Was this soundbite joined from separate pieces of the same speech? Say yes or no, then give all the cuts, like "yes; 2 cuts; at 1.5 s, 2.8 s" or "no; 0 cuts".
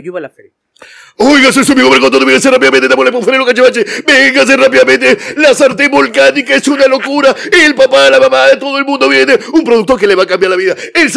no; 0 cuts